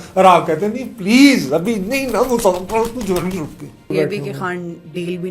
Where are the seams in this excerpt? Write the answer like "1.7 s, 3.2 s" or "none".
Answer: 3.9 s